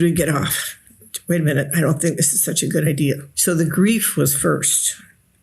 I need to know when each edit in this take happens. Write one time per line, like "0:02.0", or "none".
0:03.3